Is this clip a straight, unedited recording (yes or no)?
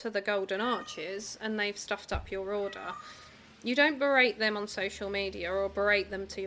yes